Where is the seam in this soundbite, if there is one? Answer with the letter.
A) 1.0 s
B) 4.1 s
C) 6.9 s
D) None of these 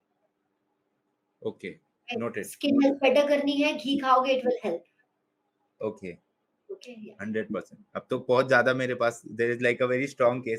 D